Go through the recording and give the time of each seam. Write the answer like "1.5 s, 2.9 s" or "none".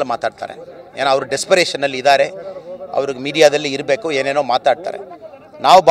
none